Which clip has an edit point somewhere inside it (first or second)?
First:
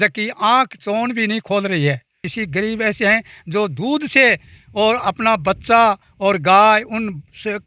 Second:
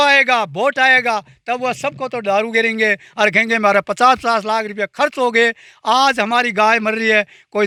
first